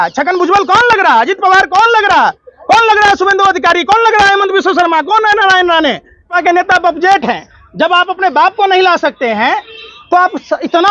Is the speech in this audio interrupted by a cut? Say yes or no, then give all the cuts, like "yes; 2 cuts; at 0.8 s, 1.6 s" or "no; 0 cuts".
yes; 1 cut; at 6.3 s